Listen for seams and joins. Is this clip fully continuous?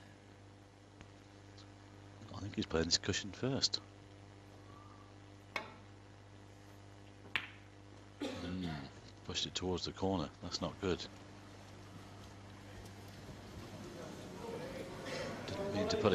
yes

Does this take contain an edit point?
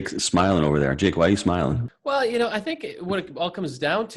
yes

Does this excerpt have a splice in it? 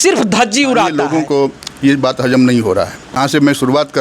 yes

